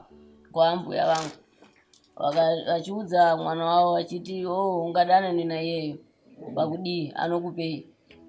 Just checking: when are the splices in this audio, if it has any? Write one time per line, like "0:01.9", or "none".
none